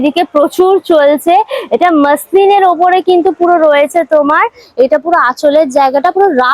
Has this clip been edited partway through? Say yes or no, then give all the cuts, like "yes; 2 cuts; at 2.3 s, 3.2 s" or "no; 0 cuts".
no; 0 cuts